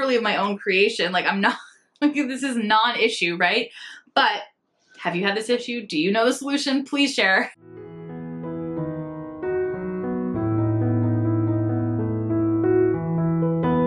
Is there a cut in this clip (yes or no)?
yes